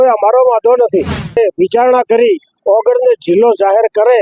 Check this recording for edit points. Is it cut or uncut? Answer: cut